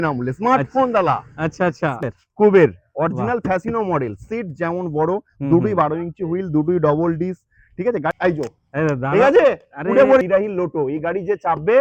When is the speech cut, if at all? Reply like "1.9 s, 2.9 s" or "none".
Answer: 2.0 s, 8.1 s, 10.2 s